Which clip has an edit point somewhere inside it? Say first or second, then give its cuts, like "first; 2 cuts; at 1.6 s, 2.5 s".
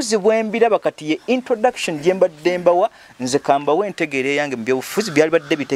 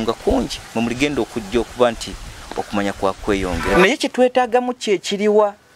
second; 1 cut; at 3.7 s